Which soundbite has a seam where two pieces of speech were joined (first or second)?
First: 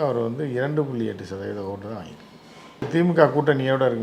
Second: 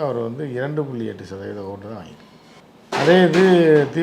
first